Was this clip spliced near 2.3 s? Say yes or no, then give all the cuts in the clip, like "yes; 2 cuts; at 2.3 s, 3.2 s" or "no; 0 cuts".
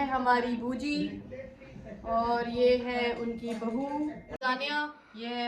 no; 1 cut; at 4.3 s